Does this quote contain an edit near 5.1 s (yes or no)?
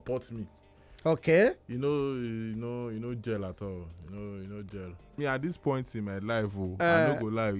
yes